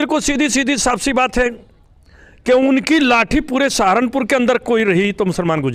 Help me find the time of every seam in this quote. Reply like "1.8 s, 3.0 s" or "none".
none